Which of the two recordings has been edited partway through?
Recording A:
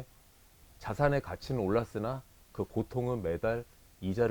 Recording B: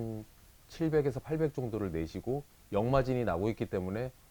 B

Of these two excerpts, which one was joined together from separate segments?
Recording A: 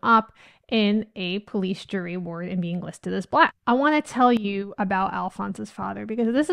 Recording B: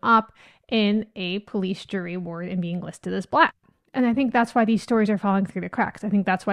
B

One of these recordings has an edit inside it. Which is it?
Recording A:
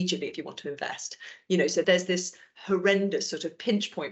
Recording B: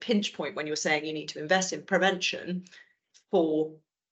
A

